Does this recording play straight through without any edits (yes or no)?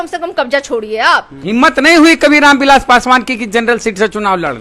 no